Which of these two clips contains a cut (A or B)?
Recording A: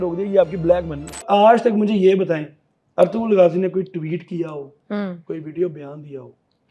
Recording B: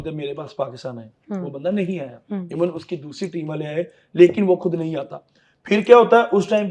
A